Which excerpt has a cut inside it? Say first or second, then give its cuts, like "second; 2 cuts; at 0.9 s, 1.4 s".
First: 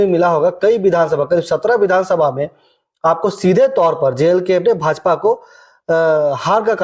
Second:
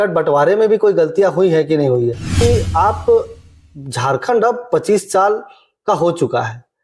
second; 1 cut; at 2.3 s